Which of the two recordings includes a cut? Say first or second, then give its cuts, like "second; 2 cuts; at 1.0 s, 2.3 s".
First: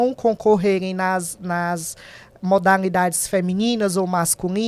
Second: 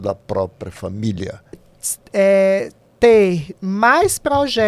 second; 1 cut; at 1.7 s